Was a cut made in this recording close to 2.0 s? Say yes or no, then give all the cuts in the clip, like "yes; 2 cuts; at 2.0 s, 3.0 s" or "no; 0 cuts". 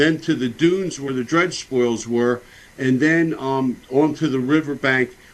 yes; 1 cut; at 2.0 s